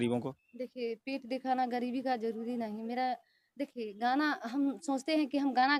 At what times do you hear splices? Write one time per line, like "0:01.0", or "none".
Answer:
none